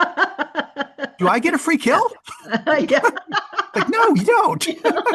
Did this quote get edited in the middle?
no; 0 cuts

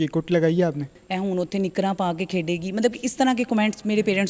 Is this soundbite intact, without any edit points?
no; 1 cut; at 1.0 s

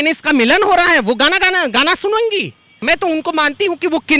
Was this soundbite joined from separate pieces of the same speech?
yes; 1 cut; at 2.8 s

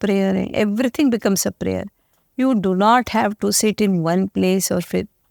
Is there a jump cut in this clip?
no; 0 cuts

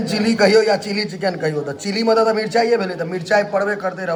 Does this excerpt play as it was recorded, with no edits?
yes; 0 cuts

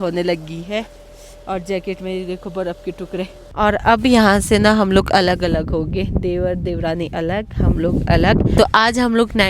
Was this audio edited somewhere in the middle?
yes; 2 cuts; at 3.5 s, 8.6 s

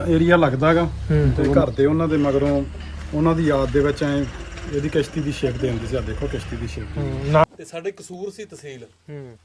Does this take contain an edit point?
yes; 2 cuts; at 1.6 s, 7.4 s

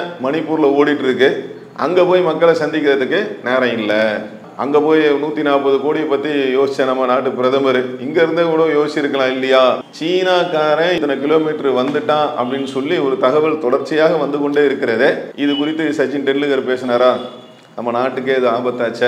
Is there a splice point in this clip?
yes; 3 cuts; at 9.9 s, 11.0 s, 15.3 s

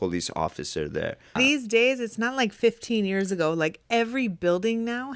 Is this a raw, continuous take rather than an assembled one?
no; 1 cut; at 1.4 s

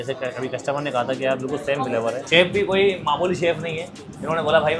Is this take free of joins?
no; 1 cut; at 2.2 s

